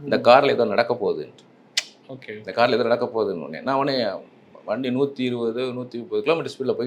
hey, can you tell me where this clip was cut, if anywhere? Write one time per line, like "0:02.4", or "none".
none